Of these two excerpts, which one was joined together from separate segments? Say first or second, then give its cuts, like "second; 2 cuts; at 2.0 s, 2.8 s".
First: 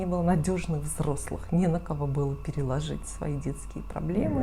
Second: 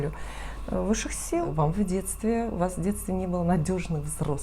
second; 1 cut; at 1.2 s